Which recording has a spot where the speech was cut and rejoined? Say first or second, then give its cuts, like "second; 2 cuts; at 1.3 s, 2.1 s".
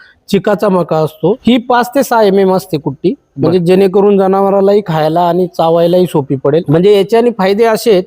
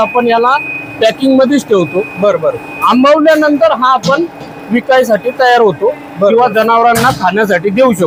first; 2 cuts; at 1.1 s, 6.7 s